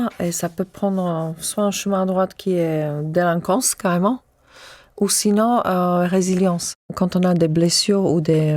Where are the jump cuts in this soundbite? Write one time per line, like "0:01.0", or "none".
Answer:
0:06.9